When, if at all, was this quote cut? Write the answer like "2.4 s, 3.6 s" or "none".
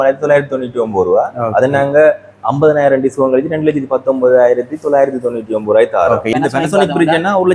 6.3 s